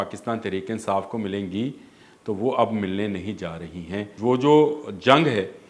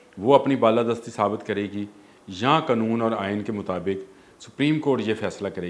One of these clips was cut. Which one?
first; 1 cut; at 4.1 s

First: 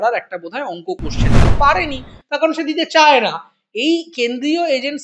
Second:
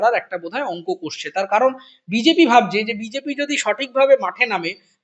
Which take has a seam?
first; 1 cut; at 1.3 s

